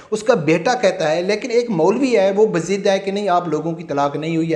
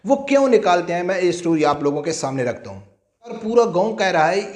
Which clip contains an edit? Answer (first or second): second